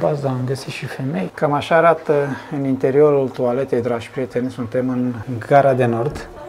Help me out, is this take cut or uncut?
cut